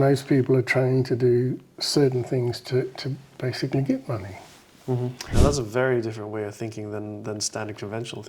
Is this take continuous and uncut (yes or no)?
no